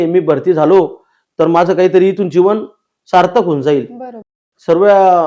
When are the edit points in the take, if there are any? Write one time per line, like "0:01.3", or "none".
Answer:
0:04.2